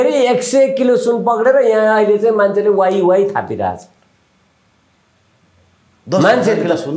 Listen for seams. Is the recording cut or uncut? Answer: uncut